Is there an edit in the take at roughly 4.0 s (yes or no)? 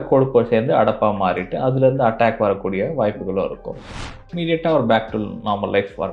yes